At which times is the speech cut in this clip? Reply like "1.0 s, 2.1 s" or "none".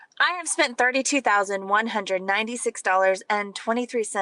none